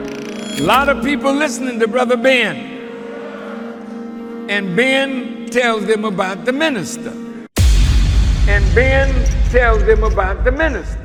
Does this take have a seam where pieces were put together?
no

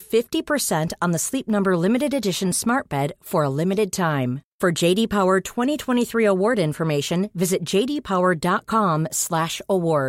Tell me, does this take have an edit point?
no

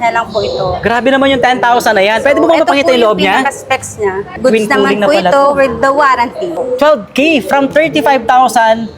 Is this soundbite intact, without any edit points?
no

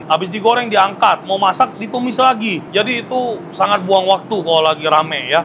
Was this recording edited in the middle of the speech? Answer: no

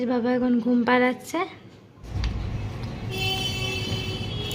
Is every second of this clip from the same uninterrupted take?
no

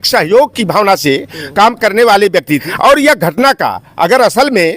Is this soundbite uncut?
no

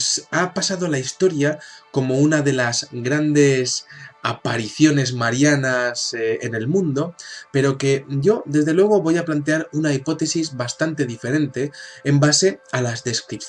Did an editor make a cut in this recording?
yes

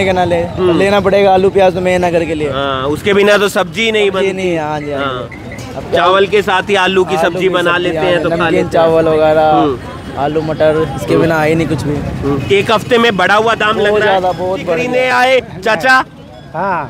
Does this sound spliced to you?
yes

